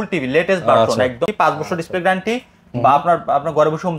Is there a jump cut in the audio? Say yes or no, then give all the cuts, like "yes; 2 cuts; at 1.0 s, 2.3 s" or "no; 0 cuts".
yes; 1 cut; at 1.2 s